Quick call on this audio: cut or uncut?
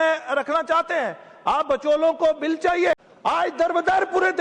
cut